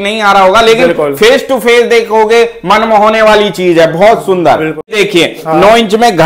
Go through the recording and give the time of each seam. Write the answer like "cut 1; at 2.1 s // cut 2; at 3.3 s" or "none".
cut 1; at 4.9 s